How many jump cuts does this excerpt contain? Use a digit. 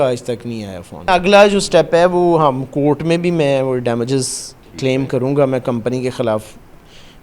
1